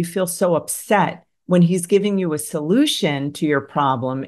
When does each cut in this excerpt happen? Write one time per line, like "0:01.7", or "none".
none